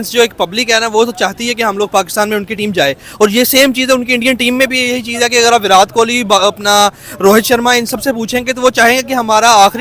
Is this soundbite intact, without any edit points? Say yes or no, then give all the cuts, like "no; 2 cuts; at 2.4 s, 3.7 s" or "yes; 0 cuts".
yes; 0 cuts